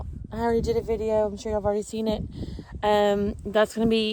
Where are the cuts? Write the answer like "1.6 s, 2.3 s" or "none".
none